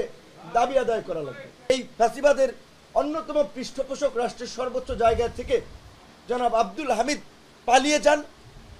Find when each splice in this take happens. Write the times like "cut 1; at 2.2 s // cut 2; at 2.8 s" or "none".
cut 1; at 1.7 s